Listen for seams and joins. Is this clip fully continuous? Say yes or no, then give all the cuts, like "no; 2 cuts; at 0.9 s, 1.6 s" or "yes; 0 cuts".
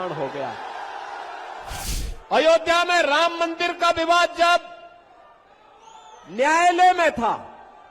no; 1 cut; at 1.8 s